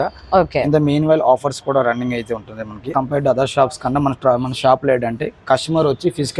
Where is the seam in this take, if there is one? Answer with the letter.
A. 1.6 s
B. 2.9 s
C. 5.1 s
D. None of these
B